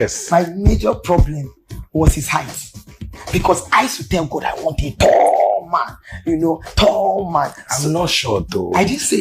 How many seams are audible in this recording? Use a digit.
0